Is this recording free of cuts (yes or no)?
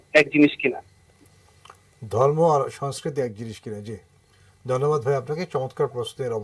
yes